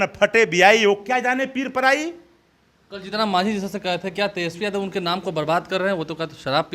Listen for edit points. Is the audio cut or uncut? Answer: uncut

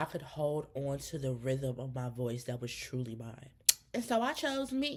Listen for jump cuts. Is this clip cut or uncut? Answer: uncut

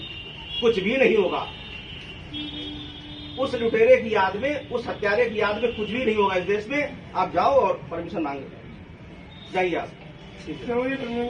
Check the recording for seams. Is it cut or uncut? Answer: uncut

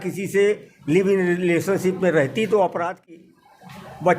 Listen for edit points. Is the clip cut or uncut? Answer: cut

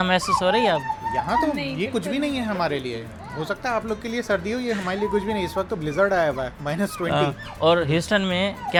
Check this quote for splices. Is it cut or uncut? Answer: uncut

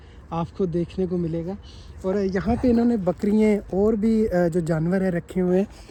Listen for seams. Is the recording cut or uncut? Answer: uncut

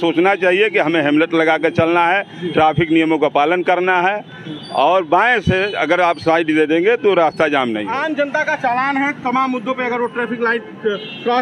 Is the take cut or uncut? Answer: cut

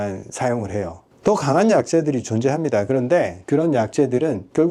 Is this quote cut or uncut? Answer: uncut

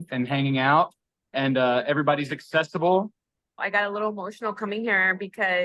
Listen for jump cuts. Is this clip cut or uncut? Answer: cut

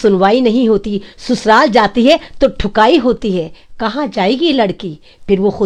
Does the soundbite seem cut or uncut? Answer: uncut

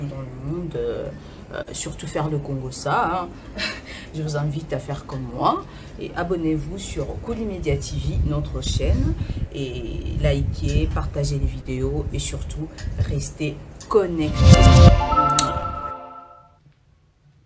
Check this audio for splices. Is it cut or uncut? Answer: cut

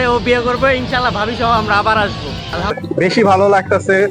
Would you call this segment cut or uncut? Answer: cut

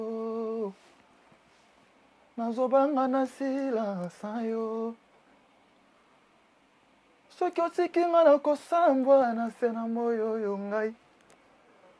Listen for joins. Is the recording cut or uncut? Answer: uncut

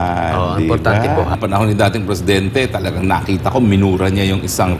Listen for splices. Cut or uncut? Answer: cut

